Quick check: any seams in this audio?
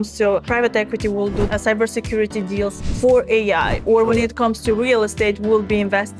yes; 1 cut; at 1.5 s

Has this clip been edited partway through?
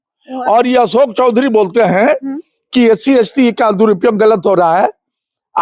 no; 0 cuts

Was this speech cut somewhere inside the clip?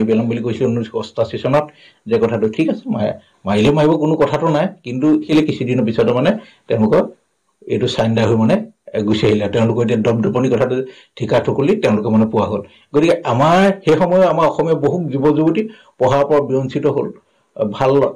yes; 1 cut; at 5.3 s

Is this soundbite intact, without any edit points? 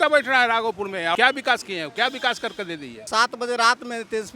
no; 2 cuts; at 1.2 s, 3.1 s

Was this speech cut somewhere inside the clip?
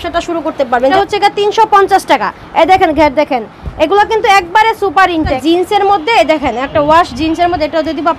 yes; 2 cuts; at 0.9 s, 5.4 s

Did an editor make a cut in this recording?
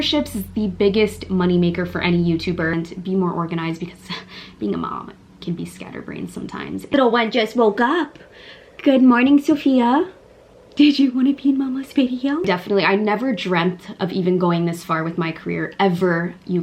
yes; 3 cuts; at 2.8 s, 6.9 s, 12.5 s

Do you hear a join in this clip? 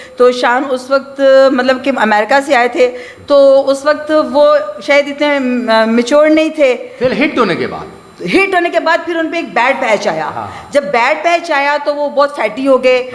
no; 0 cuts

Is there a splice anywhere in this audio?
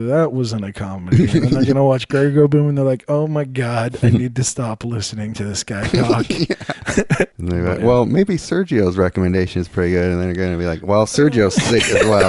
yes; 1 cut; at 7.3 s

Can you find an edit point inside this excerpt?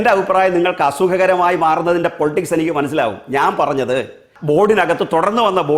yes; 1 cut; at 4.3 s

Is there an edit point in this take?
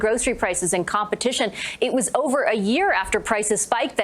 no; 0 cuts

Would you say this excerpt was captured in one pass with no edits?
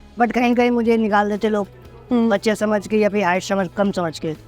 yes; 0 cuts

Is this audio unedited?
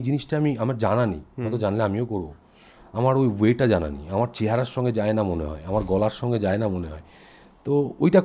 yes; 0 cuts

